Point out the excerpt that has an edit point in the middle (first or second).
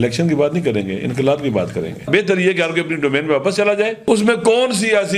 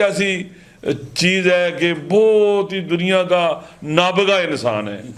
first